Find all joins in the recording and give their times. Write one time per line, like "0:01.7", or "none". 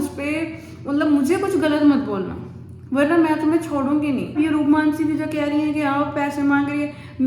0:04.3